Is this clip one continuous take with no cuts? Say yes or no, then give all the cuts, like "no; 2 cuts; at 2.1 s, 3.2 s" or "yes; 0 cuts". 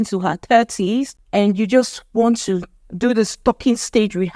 no; 1 cut; at 1.2 s